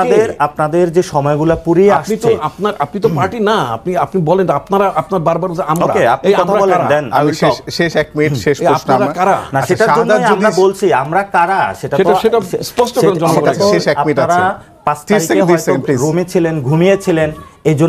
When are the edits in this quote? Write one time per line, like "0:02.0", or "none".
none